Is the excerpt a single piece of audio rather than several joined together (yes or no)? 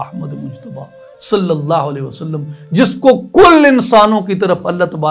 yes